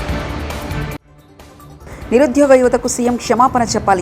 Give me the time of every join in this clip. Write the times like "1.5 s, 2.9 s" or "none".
1.1 s